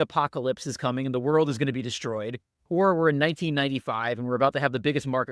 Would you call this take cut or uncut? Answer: uncut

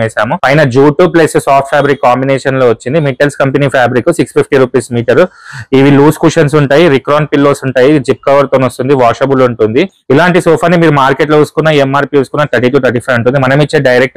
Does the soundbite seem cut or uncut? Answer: uncut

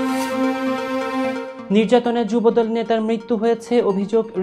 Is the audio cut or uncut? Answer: cut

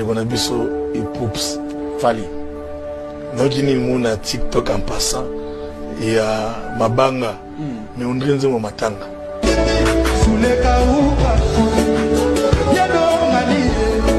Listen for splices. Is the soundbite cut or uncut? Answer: uncut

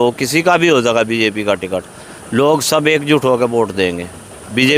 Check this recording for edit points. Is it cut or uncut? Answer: uncut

